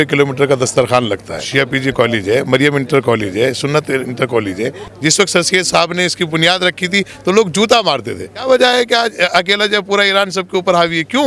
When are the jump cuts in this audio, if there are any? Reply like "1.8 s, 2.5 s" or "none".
1.4 s, 4.8 s, 8.4 s